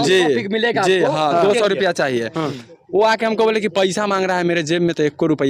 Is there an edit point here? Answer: no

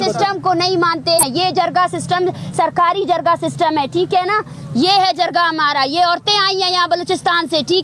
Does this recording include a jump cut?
yes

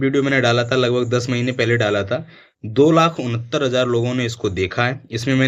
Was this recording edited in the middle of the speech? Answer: no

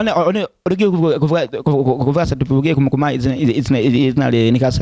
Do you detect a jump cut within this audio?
no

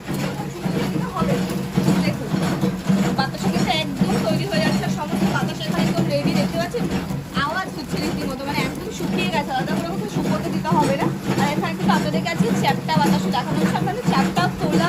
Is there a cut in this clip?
no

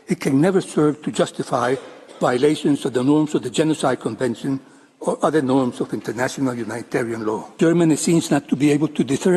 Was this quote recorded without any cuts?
no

